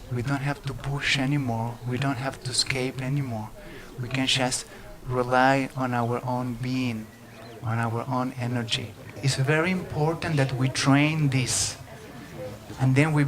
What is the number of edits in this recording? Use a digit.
1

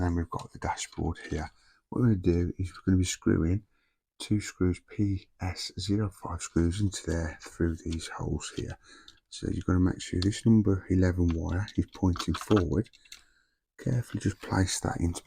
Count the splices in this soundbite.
0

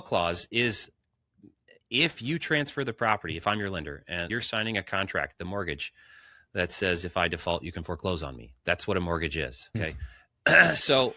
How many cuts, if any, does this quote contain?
2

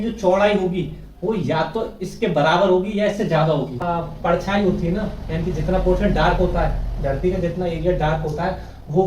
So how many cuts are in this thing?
1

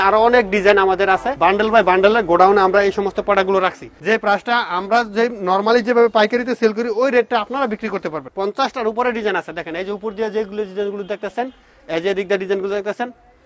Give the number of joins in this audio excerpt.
3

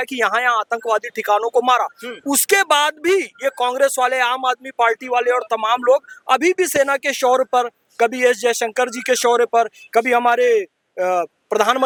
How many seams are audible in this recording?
0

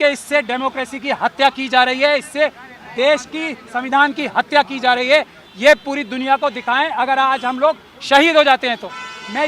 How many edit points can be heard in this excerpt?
0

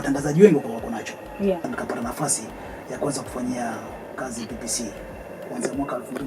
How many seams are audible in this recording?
1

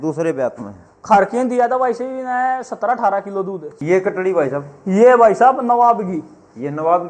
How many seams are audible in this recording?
1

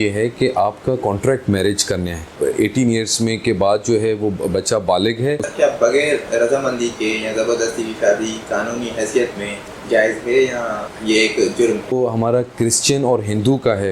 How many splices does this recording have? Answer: 5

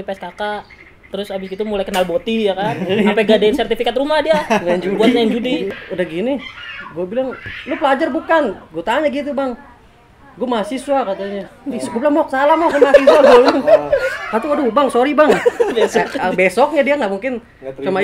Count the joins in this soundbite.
1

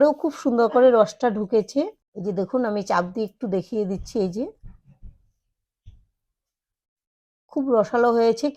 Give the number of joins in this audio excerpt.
1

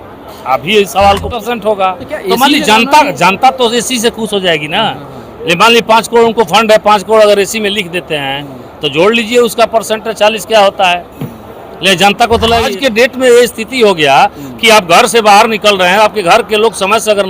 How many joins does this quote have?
2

